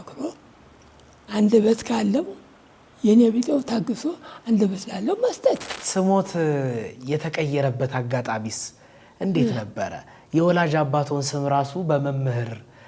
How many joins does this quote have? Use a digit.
1